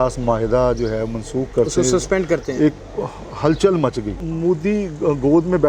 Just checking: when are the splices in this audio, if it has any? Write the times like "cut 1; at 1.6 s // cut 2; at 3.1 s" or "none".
cut 1; at 4.2 s